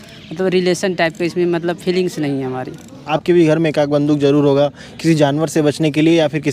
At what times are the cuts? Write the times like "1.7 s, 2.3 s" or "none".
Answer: 3.0 s